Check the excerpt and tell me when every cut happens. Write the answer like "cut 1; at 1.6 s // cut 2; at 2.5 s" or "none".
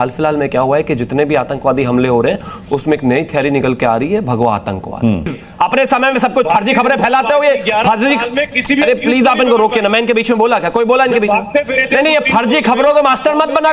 cut 1; at 5.4 s